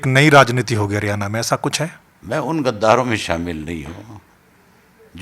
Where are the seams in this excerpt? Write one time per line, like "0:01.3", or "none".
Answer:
0:02.1